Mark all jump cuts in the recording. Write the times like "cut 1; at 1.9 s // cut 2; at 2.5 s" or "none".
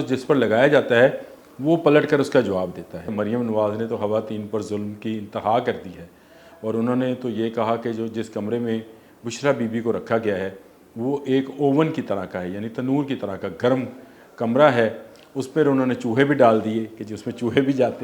cut 1; at 3.1 s